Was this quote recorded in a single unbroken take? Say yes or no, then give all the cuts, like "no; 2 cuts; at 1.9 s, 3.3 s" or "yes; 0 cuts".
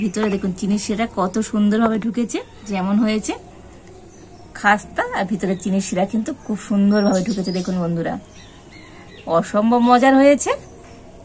no; 2 cuts; at 2.6 s, 9.1 s